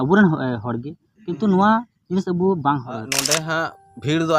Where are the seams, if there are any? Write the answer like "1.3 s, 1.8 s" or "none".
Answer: 3.2 s